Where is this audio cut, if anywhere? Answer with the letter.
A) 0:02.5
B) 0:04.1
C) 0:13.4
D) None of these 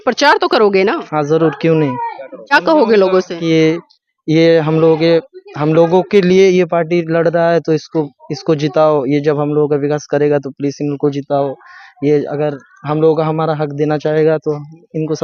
A